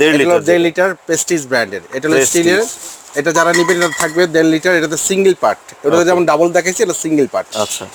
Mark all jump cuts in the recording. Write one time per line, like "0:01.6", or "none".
none